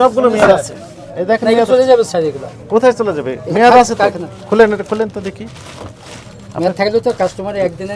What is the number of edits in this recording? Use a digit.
0